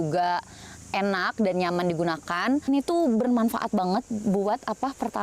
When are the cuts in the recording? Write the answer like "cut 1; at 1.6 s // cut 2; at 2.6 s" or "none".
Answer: cut 1; at 2.7 s